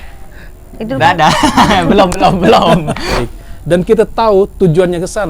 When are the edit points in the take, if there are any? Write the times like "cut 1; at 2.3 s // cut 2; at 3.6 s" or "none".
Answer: cut 1; at 3.3 s